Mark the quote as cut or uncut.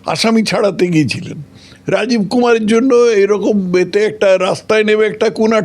uncut